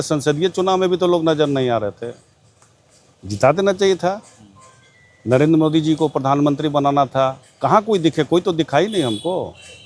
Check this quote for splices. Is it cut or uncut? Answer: uncut